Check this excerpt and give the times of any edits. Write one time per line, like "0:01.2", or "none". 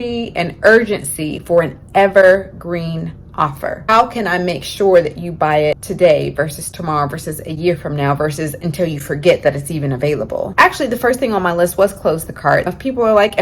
0:03.9
0:05.8
0:10.5
0:12.7